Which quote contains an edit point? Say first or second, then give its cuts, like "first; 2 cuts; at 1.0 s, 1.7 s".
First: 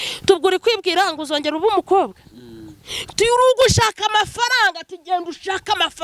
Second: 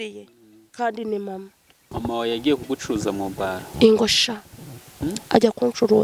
second; 1 cut; at 1.9 s